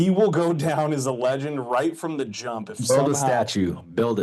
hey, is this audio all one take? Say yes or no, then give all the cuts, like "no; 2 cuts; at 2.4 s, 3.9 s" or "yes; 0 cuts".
yes; 0 cuts